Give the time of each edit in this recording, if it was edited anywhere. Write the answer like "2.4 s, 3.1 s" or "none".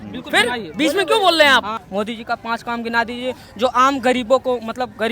1.8 s

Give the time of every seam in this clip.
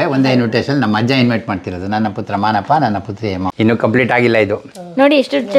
3.5 s

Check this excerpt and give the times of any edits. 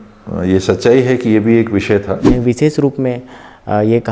2.3 s

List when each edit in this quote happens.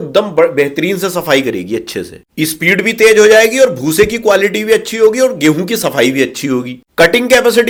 none

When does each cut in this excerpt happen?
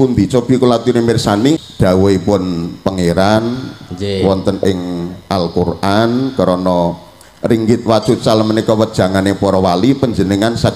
1.7 s

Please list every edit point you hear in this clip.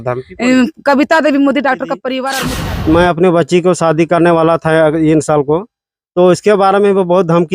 2.3 s

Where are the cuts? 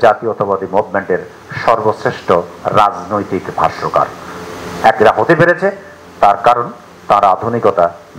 none

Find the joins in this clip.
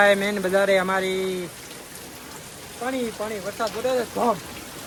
none

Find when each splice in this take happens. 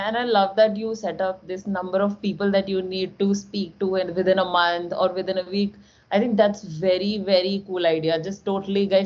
none

